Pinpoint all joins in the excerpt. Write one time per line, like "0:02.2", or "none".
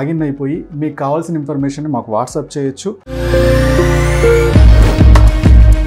0:03.0